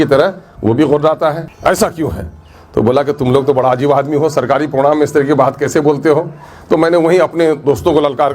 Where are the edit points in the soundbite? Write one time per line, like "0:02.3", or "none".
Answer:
none